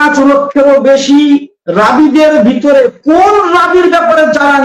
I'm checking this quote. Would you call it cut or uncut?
uncut